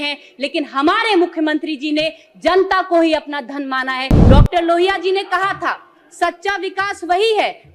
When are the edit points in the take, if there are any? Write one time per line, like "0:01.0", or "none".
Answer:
0:04.1